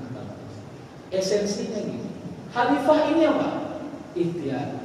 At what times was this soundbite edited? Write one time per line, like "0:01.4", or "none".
0:01.0